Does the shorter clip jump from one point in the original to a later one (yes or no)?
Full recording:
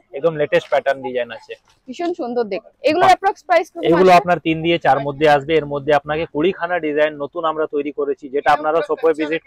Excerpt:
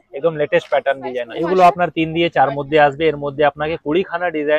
yes